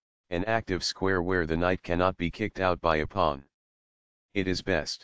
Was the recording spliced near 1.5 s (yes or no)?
yes